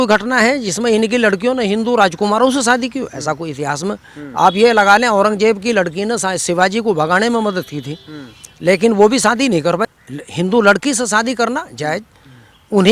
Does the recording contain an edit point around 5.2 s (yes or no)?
no